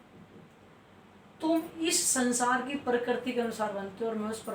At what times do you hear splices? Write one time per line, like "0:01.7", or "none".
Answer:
none